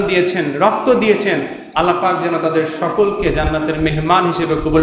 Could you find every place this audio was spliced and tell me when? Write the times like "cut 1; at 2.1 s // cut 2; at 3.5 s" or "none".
none